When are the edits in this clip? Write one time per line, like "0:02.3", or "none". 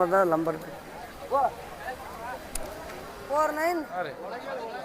0:03.1